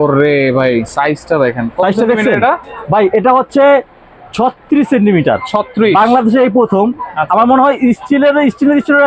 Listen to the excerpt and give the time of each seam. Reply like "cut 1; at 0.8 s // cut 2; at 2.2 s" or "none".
none